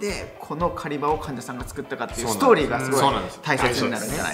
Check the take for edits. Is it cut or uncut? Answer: uncut